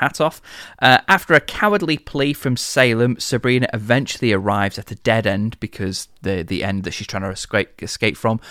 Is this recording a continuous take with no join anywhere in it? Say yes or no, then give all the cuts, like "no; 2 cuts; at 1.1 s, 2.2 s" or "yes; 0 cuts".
yes; 0 cuts